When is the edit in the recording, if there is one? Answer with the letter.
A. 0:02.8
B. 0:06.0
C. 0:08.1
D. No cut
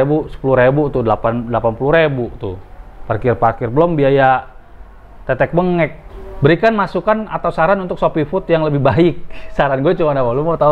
B